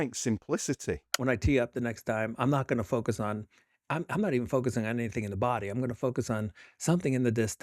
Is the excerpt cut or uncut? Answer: cut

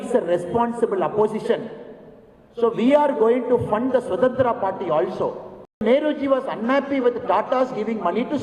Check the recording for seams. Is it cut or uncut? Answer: cut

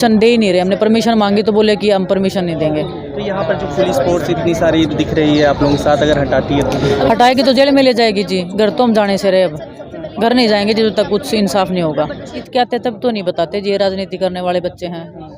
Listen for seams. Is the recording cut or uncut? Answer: cut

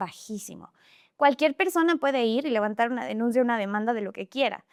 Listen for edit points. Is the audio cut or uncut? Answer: uncut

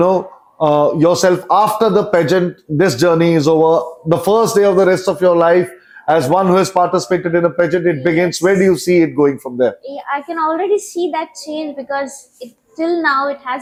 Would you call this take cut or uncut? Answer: uncut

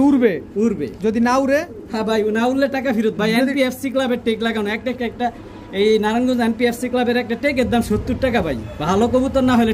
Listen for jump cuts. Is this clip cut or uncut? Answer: uncut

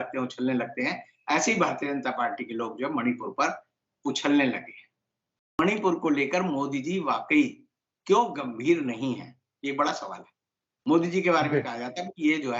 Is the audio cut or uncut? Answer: cut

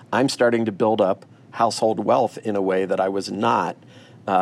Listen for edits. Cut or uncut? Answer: uncut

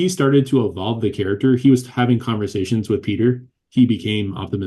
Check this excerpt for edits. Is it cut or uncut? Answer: cut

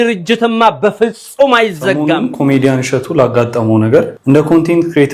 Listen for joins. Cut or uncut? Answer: cut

